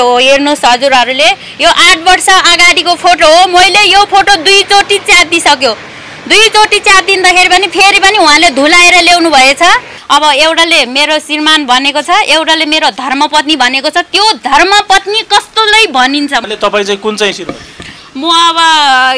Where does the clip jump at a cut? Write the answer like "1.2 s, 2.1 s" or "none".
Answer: 9.9 s, 16.5 s